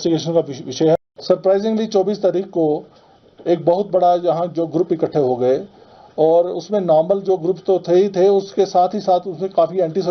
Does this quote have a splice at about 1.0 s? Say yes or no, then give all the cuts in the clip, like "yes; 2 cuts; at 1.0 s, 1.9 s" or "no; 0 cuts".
yes; 1 cut; at 1.0 s